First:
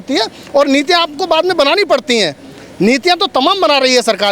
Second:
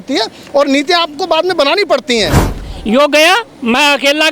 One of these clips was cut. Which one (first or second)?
second